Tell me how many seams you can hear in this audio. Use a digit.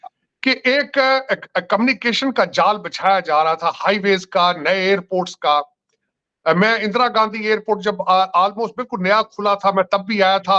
0